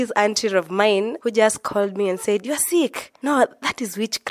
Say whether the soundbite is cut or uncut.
cut